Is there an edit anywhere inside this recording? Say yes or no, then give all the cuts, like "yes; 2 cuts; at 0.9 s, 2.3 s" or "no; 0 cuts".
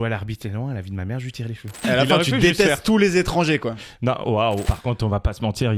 yes; 2 cuts; at 1.8 s, 4.7 s